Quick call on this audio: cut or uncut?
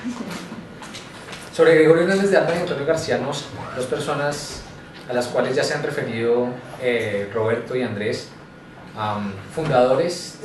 uncut